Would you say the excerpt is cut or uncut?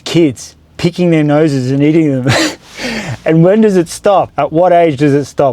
cut